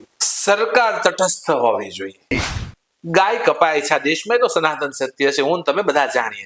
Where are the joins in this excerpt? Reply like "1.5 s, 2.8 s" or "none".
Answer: 2.3 s